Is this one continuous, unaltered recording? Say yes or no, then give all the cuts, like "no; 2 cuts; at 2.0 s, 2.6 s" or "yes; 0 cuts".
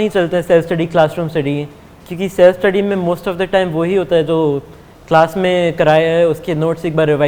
yes; 0 cuts